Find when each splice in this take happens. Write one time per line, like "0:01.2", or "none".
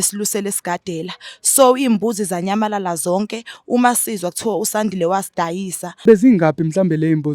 0:06.0